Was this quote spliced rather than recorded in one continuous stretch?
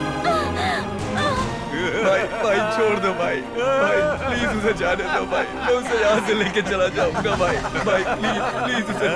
no; 0 cuts

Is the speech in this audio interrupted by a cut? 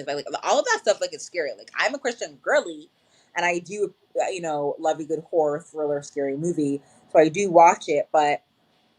no; 0 cuts

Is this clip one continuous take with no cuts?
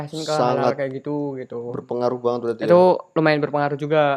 yes; 0 cuts

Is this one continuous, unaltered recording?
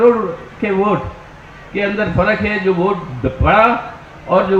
yes; 0 cuts

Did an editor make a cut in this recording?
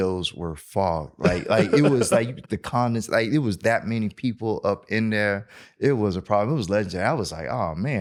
no; 0 cuts

